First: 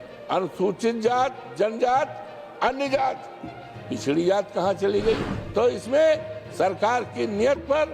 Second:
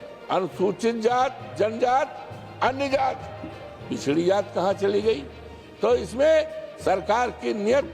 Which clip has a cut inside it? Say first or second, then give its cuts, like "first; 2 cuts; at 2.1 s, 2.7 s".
first; 1 cut; at 5.3 s